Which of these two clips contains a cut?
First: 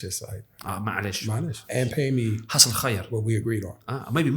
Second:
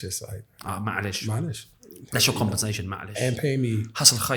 first; 1 cut; at 1.6 s

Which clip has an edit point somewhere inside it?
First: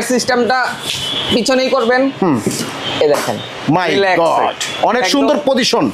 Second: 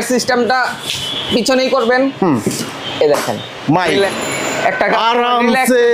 second; 1 cut; at 4.1 s

